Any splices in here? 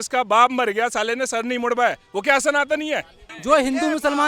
yes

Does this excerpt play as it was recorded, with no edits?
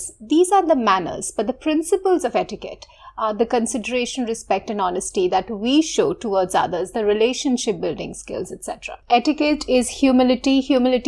no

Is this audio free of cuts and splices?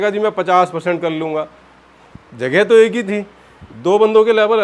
yes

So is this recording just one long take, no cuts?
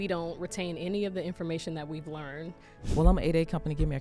no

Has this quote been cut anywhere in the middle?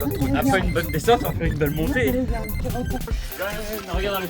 yes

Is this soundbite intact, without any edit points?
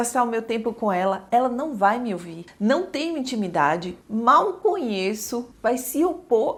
yes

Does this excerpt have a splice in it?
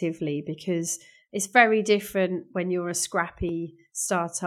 no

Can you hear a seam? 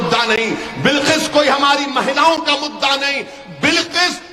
no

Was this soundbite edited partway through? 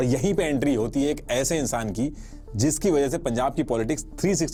no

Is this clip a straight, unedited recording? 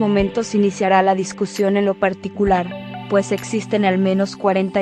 yes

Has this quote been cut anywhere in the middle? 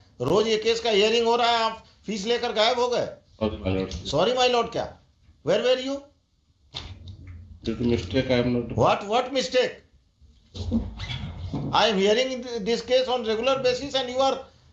no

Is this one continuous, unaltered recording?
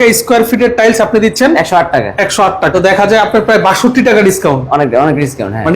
no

